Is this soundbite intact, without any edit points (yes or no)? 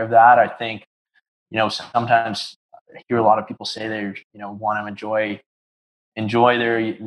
yes